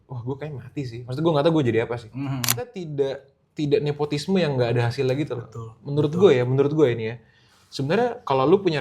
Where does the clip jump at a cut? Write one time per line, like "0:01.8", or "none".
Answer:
0:02.8